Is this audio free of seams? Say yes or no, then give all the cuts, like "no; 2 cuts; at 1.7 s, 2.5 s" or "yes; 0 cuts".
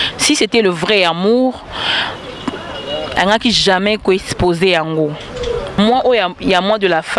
no; 1 cut; at 5.8 s